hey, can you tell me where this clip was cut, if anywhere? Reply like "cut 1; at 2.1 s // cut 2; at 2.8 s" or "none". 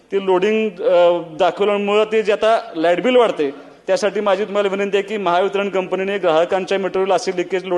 none